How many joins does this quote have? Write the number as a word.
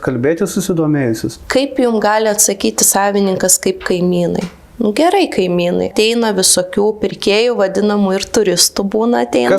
two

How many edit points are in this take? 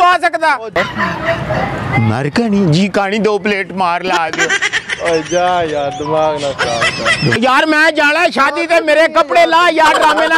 two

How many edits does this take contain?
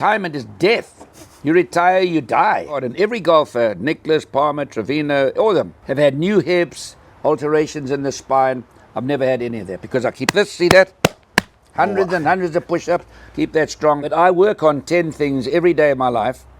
three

